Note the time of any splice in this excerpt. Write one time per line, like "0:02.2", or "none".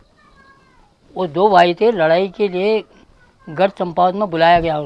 none